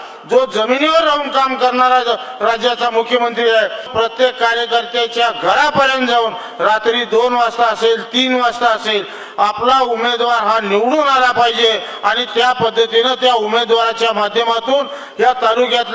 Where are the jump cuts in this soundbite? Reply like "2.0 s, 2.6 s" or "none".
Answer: 3.9 s